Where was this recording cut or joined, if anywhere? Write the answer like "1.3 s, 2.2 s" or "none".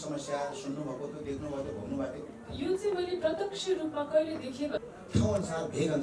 4.8 s